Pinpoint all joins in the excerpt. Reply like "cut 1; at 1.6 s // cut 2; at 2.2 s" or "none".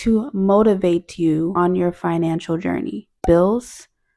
cut 1; at 1.5 s // cut 2; at 3.2 s